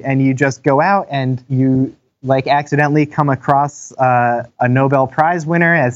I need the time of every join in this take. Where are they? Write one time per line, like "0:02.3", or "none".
0:01.5
0:04.5